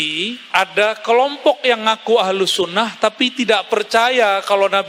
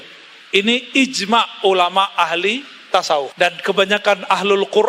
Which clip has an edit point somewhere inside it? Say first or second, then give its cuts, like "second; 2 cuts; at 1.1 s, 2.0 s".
second; 1 cut; at 3.3 s